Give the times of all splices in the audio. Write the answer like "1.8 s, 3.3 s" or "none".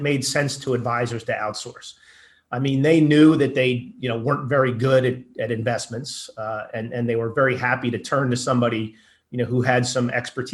none